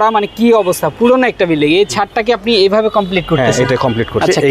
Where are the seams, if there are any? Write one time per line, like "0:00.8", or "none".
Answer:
none